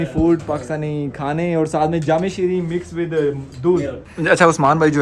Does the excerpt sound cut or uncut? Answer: cut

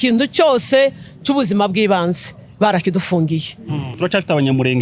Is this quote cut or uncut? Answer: cut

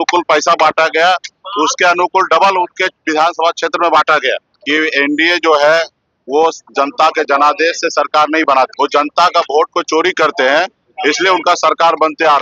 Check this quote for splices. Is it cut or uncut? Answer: cut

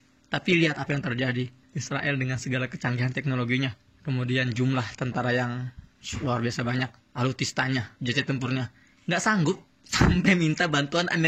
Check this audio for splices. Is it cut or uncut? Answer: cut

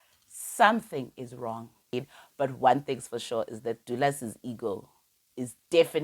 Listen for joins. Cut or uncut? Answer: cut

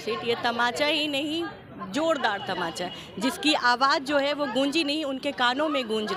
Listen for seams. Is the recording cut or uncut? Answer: uncut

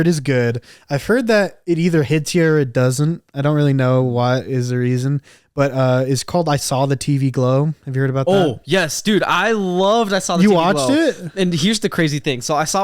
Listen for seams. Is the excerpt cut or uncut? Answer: uncut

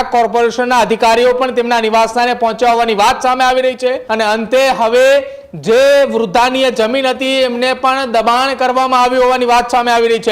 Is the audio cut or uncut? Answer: cut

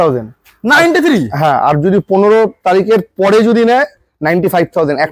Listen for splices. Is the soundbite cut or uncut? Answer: uncut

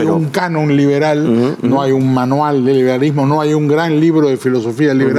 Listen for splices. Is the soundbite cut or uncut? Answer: uncut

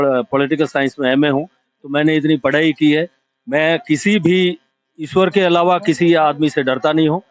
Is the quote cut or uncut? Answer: uncut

